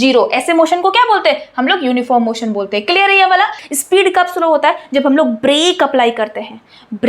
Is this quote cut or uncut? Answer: cut